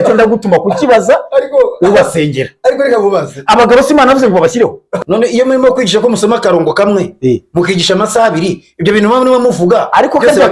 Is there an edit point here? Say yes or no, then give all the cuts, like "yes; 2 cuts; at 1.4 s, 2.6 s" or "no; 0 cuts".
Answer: yes; 1 cut; at 5.0 s